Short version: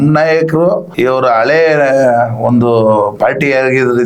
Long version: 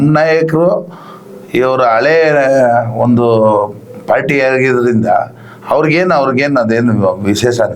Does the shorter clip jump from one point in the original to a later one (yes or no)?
yes